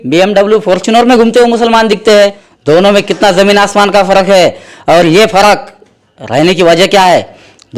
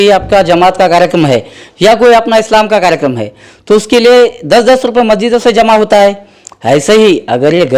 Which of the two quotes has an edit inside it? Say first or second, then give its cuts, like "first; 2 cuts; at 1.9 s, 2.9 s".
first; 1 cut; at 2.5 s